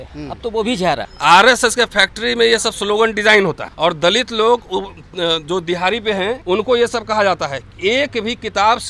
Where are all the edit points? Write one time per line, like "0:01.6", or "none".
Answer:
0:01.1
0:03.7
0:06.4